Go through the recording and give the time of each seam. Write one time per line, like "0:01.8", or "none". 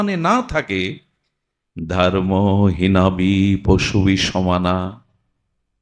none